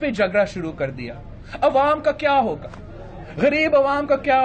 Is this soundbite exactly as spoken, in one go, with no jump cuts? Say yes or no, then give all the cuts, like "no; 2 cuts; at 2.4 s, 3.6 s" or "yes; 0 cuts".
yes; 0 cuts